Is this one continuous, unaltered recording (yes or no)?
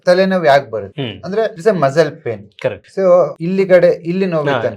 no